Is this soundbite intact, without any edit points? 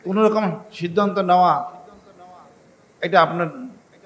yes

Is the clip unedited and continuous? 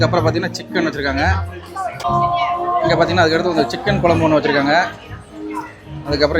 no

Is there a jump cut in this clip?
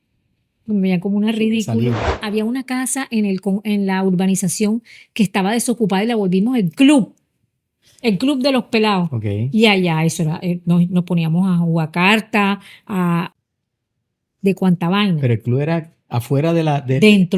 yes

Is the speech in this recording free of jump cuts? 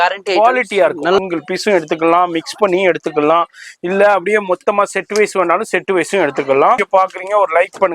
no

